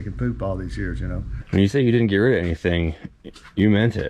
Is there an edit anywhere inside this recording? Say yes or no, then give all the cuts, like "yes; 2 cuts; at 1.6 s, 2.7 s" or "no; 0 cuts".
yes; 1 cut; at 1.3 s